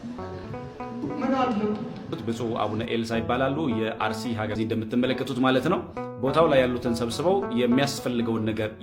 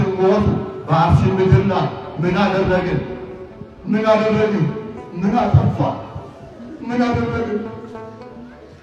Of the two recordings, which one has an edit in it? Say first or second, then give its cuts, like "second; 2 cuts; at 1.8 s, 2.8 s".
first; 1 cut; at 4.6 s